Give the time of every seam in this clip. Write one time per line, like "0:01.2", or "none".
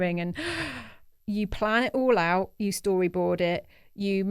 0:01.1